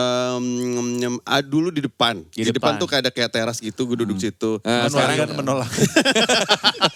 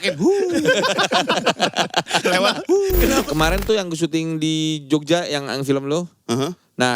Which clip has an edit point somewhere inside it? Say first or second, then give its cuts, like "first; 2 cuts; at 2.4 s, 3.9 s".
second; 1 cut; at 3.2 s